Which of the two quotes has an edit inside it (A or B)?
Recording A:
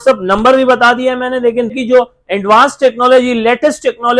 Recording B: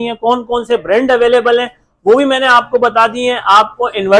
A